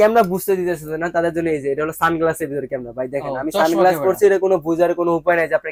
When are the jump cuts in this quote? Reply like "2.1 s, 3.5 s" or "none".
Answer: none